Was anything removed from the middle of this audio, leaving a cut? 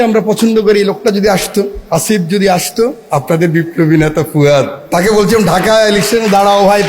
yes; 3 cuts; at 1.8 s, 3.0 s, 4.8 s

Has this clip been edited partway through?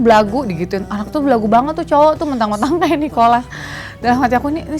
no; 0 cuts

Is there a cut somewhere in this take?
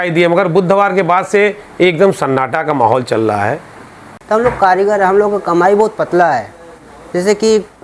yes; 1 cut; at 4.1 s

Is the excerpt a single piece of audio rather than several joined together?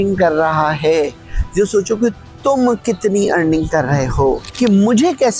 no; 1 cut; at 4.5 s

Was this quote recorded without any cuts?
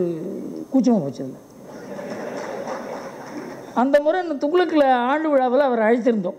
yes; 0 cuts

